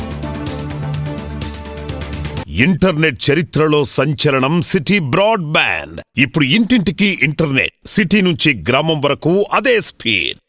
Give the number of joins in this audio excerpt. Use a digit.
1